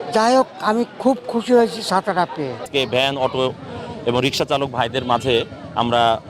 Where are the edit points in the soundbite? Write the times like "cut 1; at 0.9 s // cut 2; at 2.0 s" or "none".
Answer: cut 1; at 2.6 s